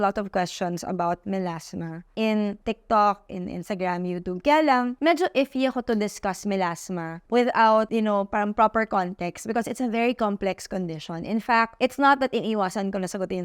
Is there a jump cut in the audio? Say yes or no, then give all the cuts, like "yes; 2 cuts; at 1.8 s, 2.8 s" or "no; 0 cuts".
yes; 2 cuts; at 2.0 s, 2.6 s